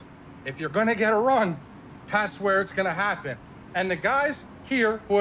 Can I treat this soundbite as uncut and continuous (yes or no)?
yes